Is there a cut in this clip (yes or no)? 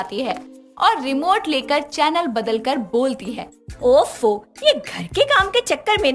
no